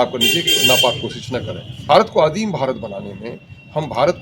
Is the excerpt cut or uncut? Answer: cut